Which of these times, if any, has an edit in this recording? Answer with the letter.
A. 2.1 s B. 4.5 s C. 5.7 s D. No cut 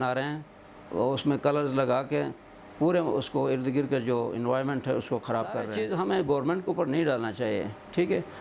C